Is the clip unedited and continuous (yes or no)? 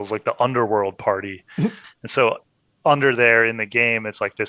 no